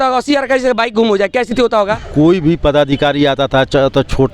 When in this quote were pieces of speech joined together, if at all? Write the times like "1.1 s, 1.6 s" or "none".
2.0 s